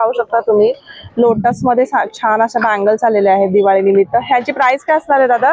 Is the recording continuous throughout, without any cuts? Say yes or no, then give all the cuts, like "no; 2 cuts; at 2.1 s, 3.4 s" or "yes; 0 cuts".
yes; 0 cuts